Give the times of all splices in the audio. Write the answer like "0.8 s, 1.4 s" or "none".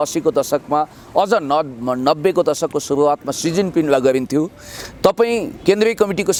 none